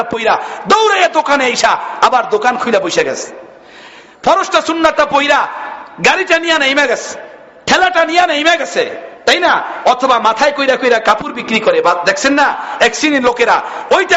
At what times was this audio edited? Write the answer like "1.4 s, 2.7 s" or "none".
none